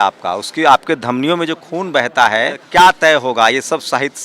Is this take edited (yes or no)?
yes